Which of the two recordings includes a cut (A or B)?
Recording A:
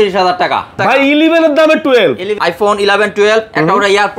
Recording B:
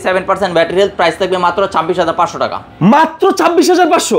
A